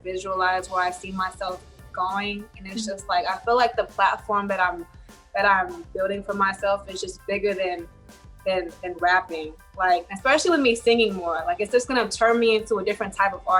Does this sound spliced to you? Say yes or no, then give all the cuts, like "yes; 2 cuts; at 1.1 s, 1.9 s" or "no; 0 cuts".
no; 0 cuts